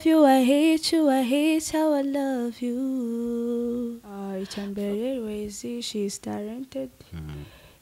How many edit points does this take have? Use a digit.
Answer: 1